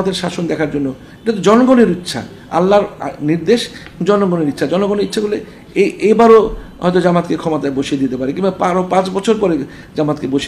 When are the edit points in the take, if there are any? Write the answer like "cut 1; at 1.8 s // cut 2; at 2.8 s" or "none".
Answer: none